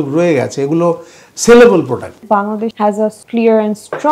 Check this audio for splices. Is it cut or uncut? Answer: cut